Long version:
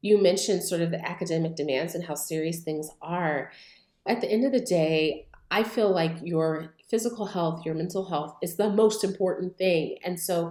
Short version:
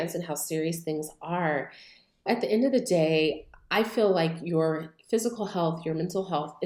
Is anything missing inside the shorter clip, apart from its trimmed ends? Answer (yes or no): no